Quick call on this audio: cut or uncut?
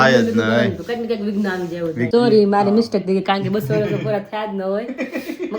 cut